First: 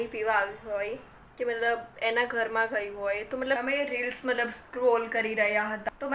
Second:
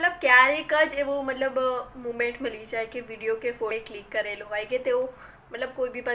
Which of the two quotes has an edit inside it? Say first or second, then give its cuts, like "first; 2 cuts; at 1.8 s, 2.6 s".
first; 1 cut; at 3.6 s